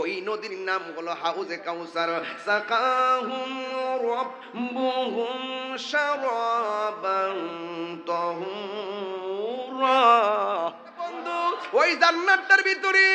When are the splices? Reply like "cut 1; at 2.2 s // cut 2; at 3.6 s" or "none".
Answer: cut 1; at 11.3 s